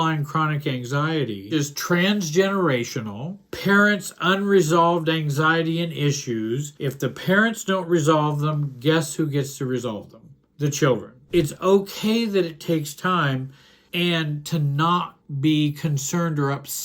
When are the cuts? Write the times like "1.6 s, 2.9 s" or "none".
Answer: 1.5 s, 11.2 s